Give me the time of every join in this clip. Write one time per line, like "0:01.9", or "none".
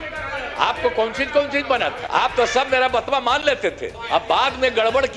0:02.0
0:03.9

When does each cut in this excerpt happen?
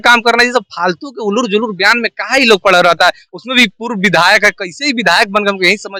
none

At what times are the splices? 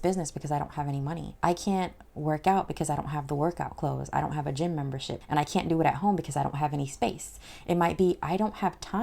0:01.3
0:05.1

